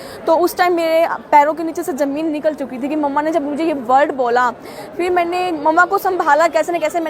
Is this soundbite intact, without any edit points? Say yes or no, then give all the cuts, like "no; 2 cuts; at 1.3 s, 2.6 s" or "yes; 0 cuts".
yes; 0 cuts